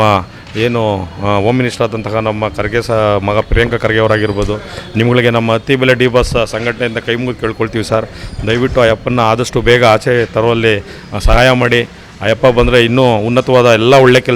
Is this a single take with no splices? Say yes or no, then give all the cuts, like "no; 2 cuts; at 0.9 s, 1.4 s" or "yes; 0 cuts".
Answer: yes; 0 cuts